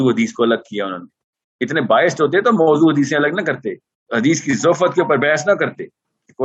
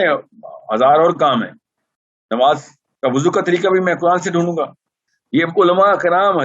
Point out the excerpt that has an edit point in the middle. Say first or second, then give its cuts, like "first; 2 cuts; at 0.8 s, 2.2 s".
second; 1 cut; at 5.1 s